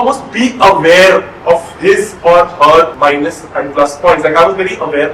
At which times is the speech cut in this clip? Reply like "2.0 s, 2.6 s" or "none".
2.9 s

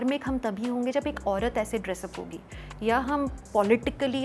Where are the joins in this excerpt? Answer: none

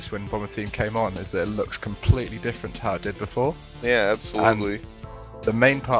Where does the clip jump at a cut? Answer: 4.9 s

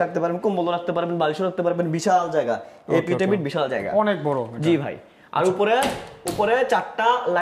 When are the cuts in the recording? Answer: none

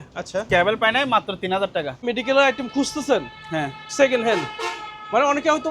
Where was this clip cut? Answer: 2.1 s

